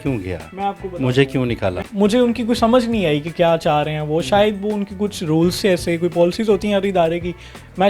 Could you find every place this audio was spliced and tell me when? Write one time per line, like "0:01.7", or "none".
0:01.8